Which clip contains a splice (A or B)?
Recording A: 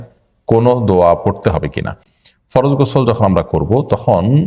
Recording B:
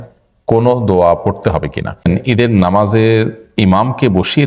B